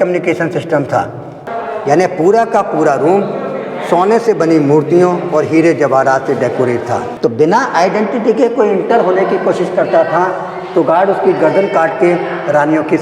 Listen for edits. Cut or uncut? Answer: cut